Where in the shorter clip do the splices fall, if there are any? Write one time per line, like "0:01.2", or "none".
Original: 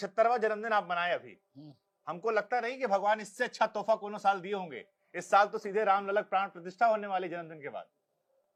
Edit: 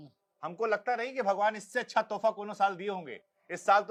none